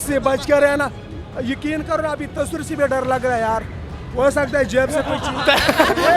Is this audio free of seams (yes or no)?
yes